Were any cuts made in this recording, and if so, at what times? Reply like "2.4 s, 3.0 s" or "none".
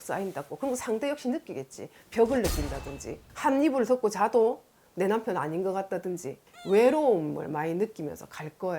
6.3 s

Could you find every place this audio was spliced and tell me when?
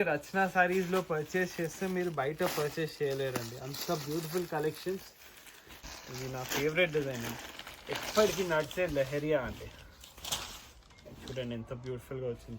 6.0 s

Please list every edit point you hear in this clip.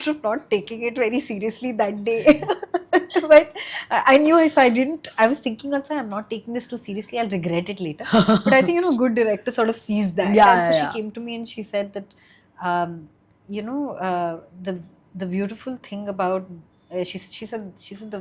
none

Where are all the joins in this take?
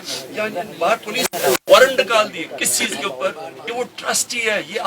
3.6 s

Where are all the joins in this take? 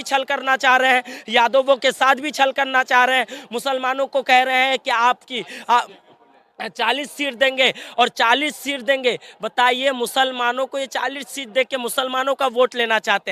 none

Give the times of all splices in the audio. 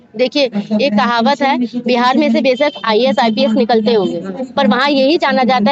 none

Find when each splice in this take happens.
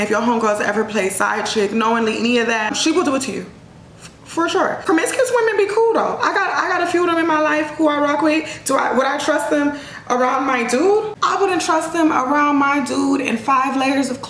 2.7 s, 4.8 s, 11.1 s

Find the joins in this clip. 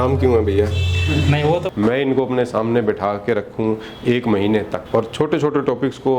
1.7 s, 4.8 s

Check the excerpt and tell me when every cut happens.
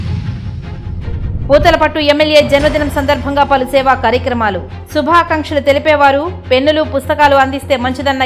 none

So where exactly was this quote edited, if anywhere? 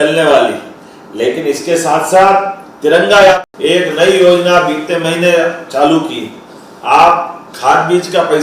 3.4 s

